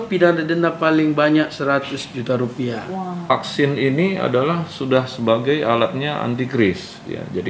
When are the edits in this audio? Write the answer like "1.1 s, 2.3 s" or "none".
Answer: 3.3 s